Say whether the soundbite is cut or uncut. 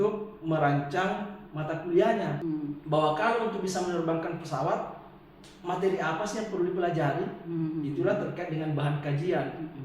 cut